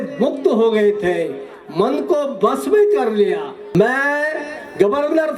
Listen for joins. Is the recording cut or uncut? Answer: cut